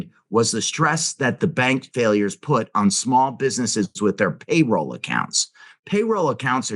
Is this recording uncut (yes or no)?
no